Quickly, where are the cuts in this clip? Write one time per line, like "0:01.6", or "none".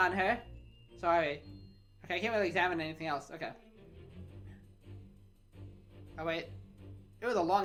none